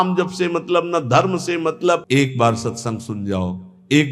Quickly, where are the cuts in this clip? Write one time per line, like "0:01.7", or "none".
0:02.0